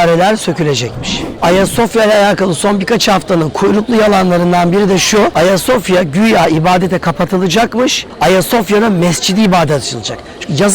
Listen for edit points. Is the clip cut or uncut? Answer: cut